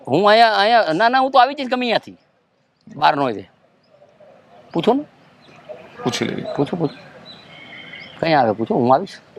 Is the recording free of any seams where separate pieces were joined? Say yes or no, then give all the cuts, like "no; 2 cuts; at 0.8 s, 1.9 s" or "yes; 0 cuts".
yes; 0 cuts